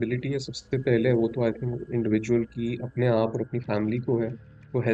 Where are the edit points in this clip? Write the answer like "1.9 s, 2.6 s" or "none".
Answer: none